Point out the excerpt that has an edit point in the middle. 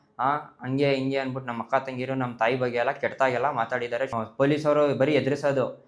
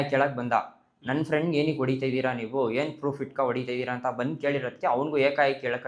first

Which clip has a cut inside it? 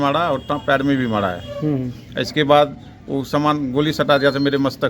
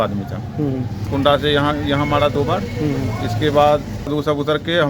second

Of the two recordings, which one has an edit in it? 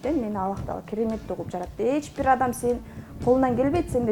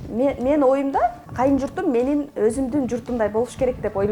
second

